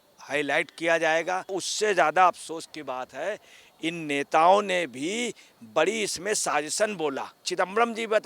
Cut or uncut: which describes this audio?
cut